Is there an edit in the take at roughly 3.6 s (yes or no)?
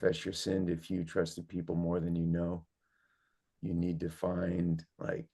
yes